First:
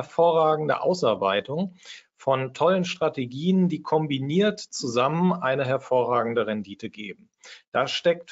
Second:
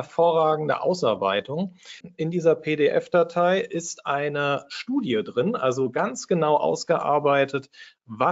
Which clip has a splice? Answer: second; 1 cut; at 2.1 s

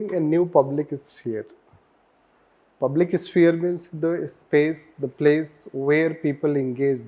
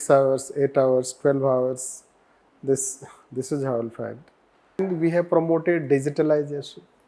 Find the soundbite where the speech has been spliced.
second; 1 cut; at 4.8 s

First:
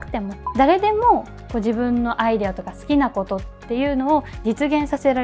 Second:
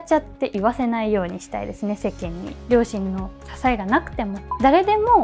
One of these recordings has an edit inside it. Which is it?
second; 1 cut; at 2.6 s

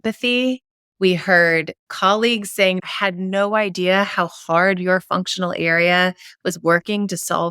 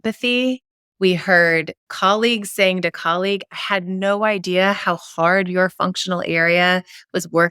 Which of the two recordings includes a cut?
first; 1 cut; at 2.9 s

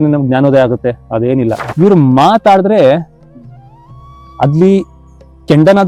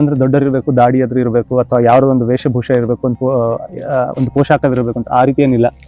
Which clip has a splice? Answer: first; 1 cut; at 1.6 s

